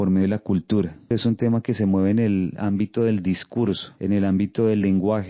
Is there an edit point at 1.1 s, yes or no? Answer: yes